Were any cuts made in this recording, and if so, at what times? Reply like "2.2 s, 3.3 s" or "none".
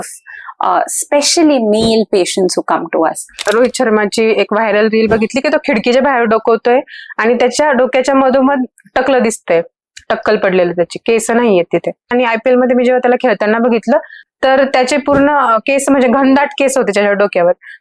3.4 s, 12.1 s